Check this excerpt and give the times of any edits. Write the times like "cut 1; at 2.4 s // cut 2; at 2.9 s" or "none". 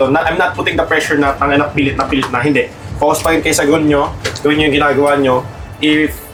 none